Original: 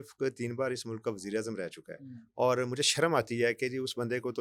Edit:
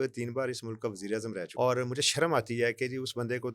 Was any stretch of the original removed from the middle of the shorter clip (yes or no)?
yes